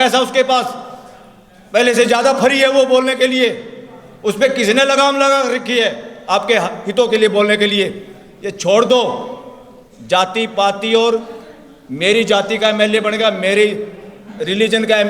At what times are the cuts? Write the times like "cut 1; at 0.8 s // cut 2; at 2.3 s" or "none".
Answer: none